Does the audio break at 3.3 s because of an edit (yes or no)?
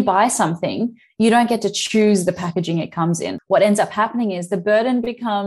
yes